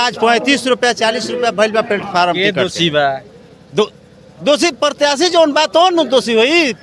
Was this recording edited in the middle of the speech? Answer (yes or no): no